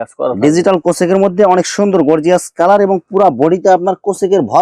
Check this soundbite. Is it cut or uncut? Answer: uncut